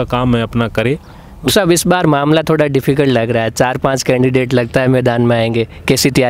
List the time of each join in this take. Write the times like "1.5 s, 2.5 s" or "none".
1.5 s